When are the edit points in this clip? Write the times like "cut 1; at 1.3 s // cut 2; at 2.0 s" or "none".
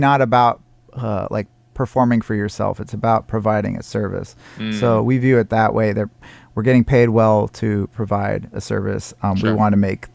none